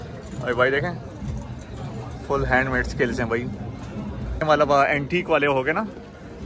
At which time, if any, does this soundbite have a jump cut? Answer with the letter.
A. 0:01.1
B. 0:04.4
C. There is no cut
B